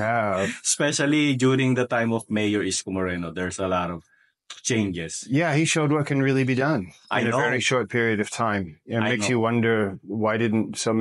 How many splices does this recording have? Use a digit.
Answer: 0